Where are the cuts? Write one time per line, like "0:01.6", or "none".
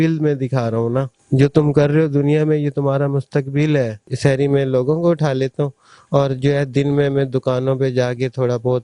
0:01.2
0:04.0

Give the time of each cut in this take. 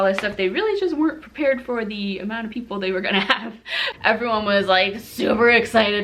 0:03.9

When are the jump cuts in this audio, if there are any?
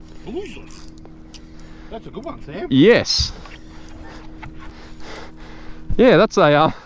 0:04.7

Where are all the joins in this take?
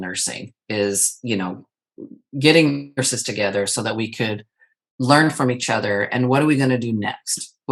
none

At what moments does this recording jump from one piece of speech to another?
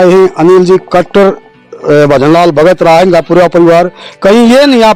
none

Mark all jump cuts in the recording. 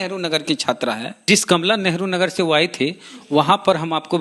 0:01.1

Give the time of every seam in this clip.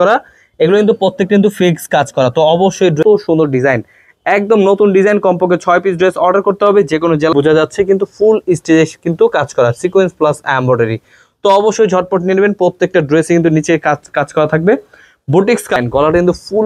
0:03.0
0:07.3
0:15.7

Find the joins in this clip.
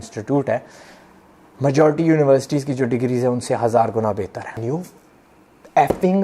0:04.6

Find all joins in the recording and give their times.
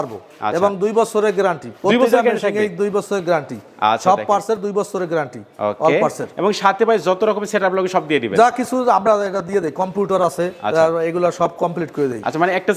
none

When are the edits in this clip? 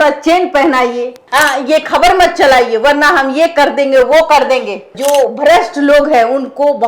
0:01.2
0:04.9

